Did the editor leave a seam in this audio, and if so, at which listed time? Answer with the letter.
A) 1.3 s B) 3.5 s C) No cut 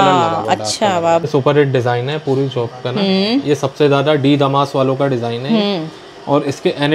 A